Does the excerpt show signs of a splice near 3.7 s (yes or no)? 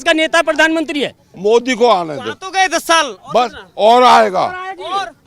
no